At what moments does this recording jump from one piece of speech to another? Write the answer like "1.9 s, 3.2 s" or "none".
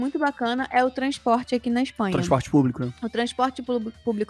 none